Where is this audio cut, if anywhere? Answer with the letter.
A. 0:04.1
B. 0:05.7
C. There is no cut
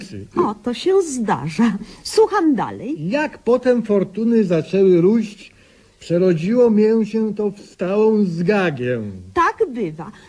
A